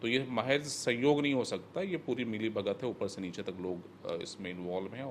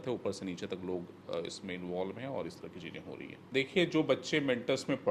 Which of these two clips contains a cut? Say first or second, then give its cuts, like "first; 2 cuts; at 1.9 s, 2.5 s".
second; 1 cut; at 3.4 s